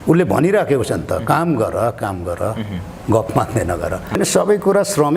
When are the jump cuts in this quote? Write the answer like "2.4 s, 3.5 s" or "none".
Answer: 4.2 s